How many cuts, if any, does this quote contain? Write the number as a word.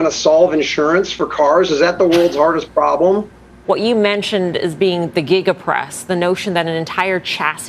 one